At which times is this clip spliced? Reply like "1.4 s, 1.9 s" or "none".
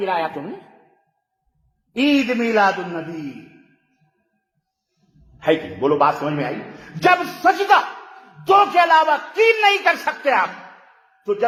none